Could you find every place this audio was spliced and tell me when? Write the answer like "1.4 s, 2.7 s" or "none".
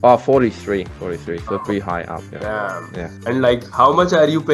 0.9 s, 2.3 s, 3.1 s